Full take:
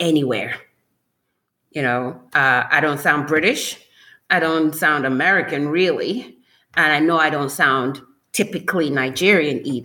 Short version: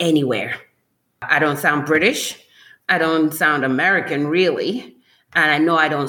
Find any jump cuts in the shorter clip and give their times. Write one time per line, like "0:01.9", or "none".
0:01.3